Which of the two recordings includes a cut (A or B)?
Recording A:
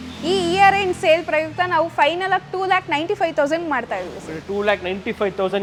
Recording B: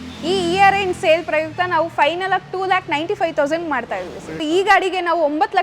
B